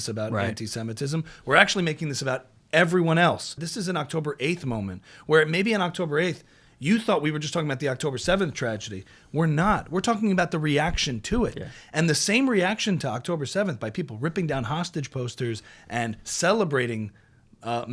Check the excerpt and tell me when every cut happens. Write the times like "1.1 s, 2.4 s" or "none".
3.6 s